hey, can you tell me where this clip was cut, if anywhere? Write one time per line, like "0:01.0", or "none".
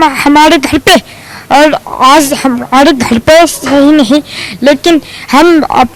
none